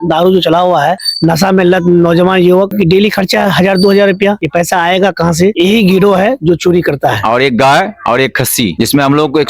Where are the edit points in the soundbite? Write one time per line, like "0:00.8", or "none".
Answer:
0:07.2